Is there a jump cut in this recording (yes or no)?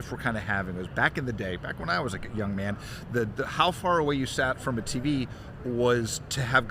no